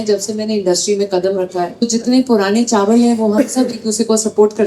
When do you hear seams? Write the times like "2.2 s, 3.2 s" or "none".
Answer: 1.9 s